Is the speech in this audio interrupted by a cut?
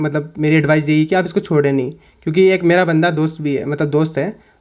no; 0 cuts

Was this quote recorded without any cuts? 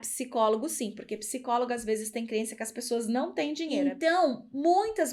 no; 1 cut; at 3.7 s

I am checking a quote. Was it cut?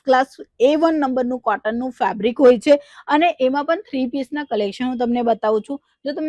no; 0 cuts

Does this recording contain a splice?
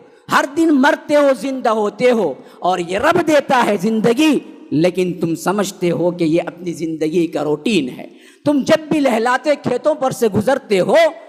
no; 0 cuts

